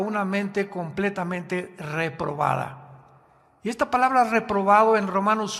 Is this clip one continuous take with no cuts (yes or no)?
yes